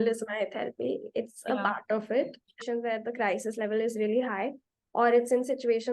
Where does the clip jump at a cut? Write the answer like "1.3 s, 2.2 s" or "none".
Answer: 2.6 s